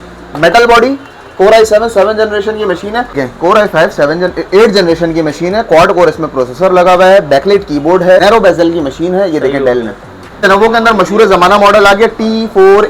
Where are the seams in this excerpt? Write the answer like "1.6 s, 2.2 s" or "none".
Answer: 3.2 s, 8.2 s, 10.4 s